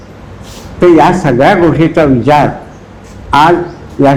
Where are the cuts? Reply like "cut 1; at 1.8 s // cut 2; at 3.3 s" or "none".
none